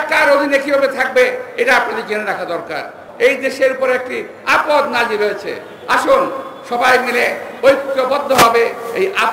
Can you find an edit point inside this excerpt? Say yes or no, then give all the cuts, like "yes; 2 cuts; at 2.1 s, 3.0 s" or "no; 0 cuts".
yes; 1 cut; at 3.0 s